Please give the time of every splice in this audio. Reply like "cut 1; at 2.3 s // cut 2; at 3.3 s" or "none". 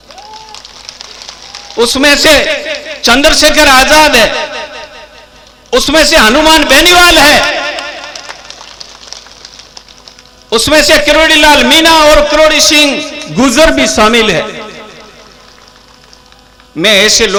none